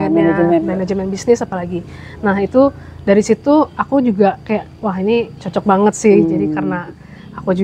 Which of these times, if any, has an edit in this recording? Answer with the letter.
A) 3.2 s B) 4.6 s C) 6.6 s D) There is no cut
D